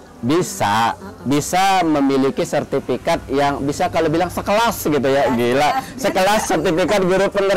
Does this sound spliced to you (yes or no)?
no